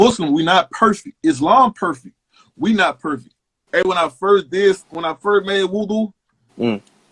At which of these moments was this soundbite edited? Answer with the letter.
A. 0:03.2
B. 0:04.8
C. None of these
A